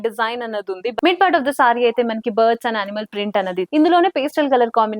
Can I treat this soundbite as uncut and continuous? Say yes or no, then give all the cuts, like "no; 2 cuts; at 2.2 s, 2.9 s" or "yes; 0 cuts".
no; 2 cuts; at 0.9 s, 3.7 s